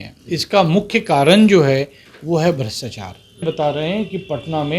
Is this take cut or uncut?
cut